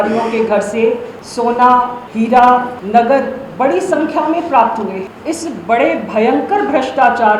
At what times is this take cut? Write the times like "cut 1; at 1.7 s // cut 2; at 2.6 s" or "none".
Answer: cut 1; at 1.2 s // cut 2; at 2.0 s // cut 3; at 2.8 s // cut 4; at 5.1 s